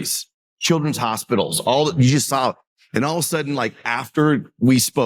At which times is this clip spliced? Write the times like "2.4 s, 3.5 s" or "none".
none